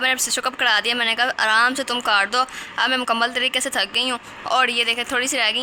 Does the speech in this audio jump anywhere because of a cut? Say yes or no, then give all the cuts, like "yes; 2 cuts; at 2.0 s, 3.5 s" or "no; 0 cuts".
no; 0 cuts